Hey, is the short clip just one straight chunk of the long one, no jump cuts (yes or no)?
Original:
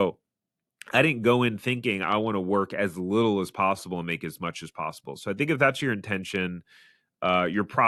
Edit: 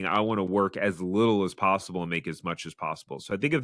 yes